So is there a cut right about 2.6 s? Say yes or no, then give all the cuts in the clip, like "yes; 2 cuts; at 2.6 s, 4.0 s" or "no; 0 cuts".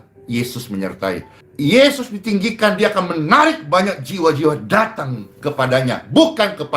no; 1 cut; at 1.4 s